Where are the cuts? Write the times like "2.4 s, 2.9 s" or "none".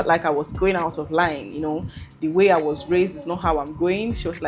none